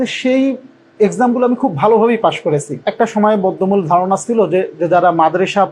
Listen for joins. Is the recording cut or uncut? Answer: cut